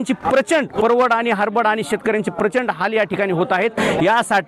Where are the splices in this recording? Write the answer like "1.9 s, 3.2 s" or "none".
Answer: none